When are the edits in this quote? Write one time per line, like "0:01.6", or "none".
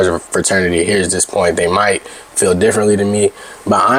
none